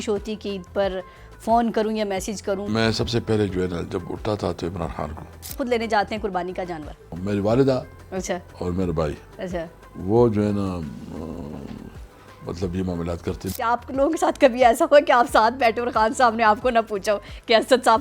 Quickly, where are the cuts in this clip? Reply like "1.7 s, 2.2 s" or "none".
2.7 s, 5.5 s, 7.1 s, 13.5 s